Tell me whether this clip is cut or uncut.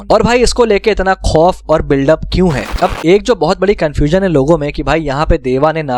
cut